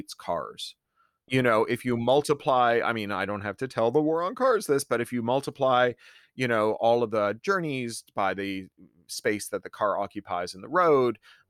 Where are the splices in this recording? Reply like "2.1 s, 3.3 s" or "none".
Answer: 1.0 s